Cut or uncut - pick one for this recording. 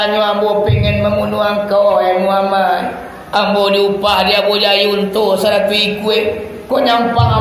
uncut